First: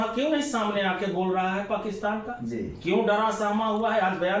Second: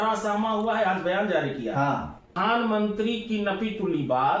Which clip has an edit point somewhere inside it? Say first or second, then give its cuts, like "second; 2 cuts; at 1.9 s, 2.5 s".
second; 1 cut; at 2.3 s